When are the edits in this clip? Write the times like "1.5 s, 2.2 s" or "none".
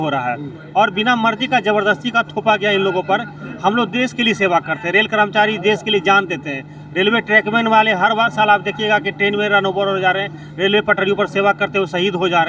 none